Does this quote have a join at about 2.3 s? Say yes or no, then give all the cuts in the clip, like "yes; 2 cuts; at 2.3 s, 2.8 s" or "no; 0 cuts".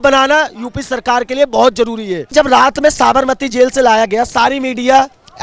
yes; 1 cut; at 2.3 s